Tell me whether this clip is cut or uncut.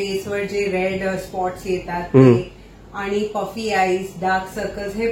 uncut